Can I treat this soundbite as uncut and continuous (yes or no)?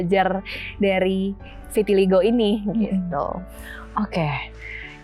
yes